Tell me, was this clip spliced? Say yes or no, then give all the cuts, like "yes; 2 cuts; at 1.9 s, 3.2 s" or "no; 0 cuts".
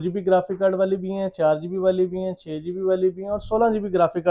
no; 0 cuts